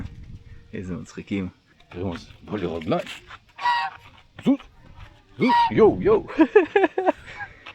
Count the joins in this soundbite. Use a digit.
1